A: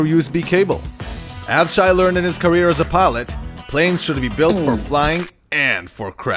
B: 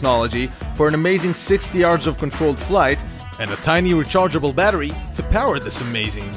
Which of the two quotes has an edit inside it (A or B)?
A